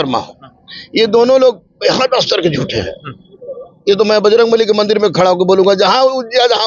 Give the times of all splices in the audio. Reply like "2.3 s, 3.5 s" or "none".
none